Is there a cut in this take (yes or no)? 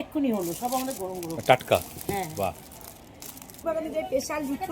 yes